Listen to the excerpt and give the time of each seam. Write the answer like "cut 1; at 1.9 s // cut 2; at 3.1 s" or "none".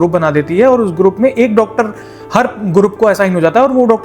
none